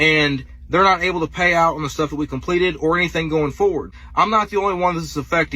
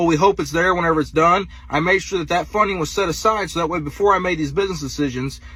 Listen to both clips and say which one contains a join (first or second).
first